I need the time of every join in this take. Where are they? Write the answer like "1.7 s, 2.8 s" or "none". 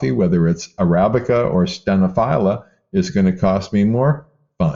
none